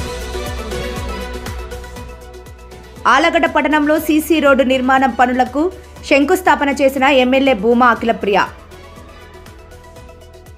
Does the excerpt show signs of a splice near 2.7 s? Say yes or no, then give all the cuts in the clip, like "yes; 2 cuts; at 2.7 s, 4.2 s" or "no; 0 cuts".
yes; 1 cut; at 2.7 s